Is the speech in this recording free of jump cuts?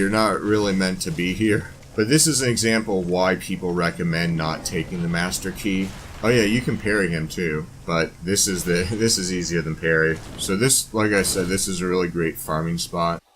no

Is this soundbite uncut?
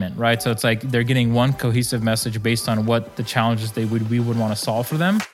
yes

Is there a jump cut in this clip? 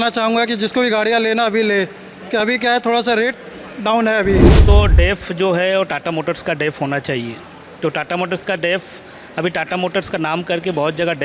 yes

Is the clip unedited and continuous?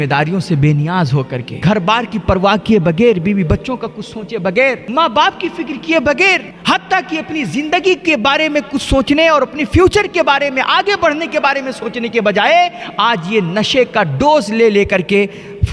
no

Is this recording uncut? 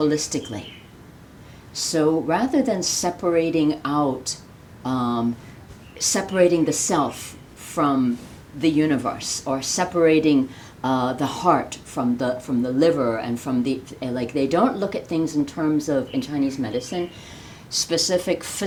yes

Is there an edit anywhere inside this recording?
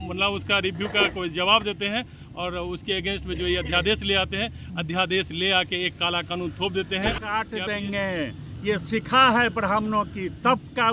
yes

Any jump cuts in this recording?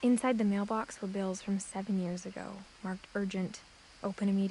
no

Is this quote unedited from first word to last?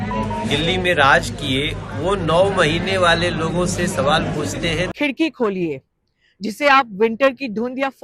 no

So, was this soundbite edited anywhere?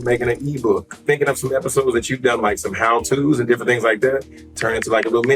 yes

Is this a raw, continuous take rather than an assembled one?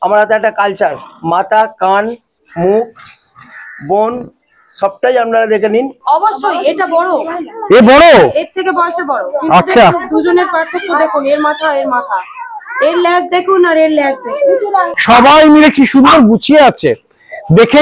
no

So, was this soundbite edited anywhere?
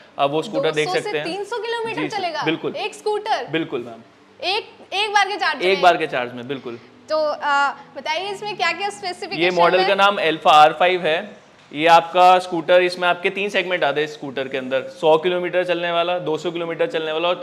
no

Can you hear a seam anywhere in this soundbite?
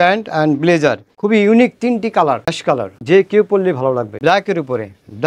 yes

